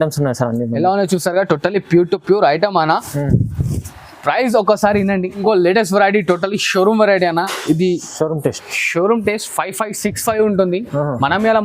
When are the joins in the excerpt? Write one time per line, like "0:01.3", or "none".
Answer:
0:05.4